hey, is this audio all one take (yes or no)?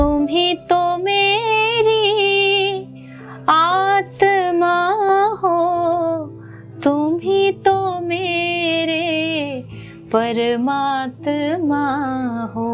yes